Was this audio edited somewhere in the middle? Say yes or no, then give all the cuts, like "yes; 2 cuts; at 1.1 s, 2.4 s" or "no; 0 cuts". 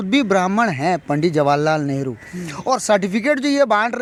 no; 0 cuts